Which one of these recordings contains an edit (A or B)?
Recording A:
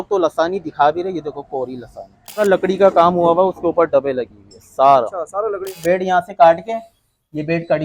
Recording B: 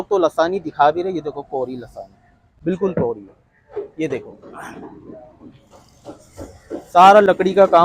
A